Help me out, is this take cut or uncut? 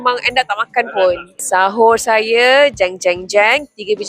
cut